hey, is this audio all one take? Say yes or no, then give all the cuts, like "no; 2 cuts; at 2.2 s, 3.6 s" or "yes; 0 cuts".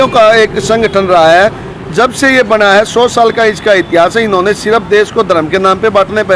yes; 0 cuts